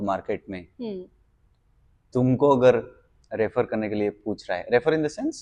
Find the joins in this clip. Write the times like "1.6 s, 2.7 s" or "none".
none